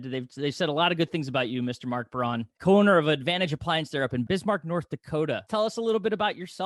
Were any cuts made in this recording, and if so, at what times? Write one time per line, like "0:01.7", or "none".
0:02.5
0:04.2
0:05.4